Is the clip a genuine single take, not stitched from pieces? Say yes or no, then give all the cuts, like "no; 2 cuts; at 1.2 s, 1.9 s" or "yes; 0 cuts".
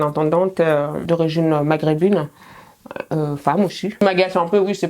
no; 2 cuts; at 1.0 s, 3.8 s